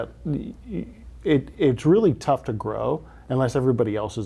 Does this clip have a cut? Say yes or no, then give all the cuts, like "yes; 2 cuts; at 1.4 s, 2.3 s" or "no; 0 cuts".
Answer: no; 0 cuts